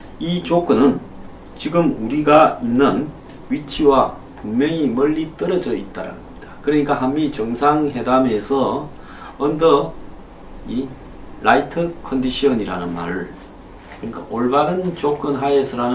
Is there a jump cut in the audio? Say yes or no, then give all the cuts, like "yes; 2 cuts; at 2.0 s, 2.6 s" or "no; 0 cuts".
no; 0 cuts